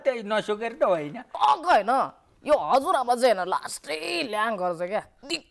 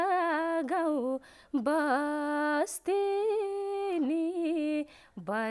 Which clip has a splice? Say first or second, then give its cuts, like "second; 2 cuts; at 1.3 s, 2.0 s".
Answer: first; 1 cut; at 1.2 s